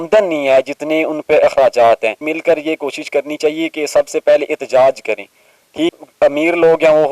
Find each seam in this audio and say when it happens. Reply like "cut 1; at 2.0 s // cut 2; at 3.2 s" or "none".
cut 1; at 2.2 s // cut 2; at 5.9 s